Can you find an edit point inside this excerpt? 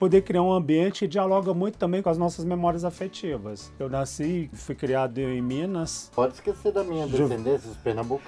yes; 3 cuts; at 1.0 s, 2.0 s, 6.1 s

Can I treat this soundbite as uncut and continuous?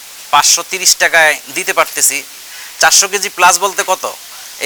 yes; 0 cuts

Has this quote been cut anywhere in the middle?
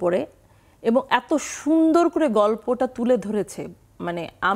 no; 0 cuts

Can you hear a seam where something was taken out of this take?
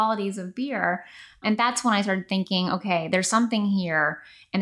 yes; 1 cut; at 1.4 s

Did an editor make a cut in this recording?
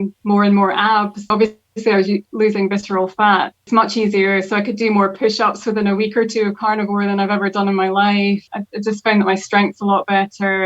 yes; 3 cuts; at 1.3 s, 3.6 s, 8.5 s

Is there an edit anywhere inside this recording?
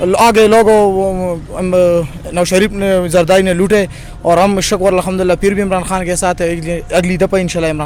no; 0 cuts

